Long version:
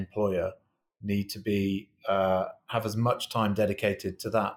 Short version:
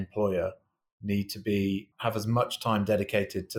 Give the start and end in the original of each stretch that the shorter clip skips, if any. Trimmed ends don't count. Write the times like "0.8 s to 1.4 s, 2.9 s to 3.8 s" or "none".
1.9 s to 2.6 s